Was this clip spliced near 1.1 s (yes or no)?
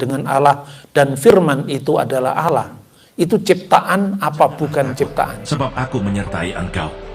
no